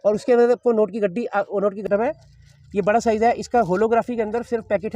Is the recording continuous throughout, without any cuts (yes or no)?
no